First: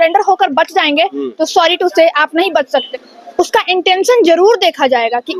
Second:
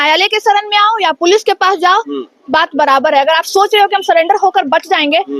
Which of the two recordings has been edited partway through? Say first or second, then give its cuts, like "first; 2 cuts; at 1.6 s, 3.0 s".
first; 1 cut; at 2.9 s